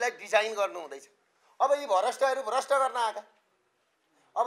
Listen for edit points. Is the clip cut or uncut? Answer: uncut